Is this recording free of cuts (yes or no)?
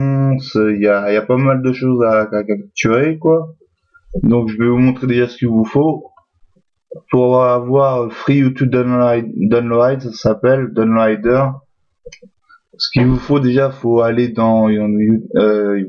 yes